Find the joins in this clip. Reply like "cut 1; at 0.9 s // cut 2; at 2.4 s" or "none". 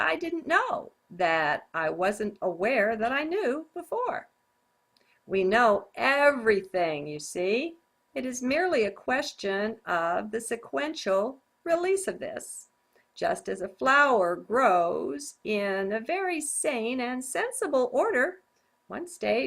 cut 1; at 3.0 s